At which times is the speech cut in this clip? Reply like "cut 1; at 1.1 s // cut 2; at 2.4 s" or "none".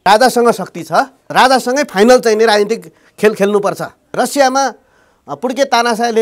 cut 1; at 1.2 s // cut 2; at 4.1 s